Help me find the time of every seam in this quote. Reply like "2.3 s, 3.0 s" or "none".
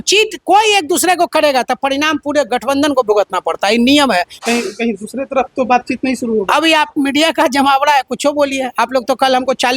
4.4 s